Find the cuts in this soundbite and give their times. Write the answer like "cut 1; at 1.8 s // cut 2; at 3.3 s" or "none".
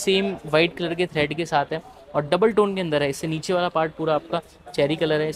none